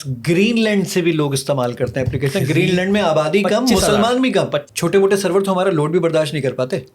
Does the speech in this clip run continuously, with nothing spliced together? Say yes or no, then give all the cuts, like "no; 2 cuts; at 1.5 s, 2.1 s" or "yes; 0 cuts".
no; 1 cut; at 4.6 s